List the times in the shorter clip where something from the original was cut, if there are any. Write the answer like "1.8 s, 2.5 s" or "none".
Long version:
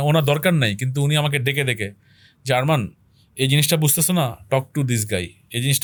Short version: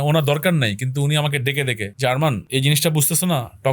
1.9 s, 2.4 s